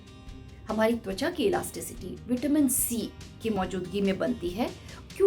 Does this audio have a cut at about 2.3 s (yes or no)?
no